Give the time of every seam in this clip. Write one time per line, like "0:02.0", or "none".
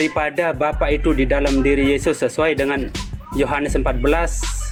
none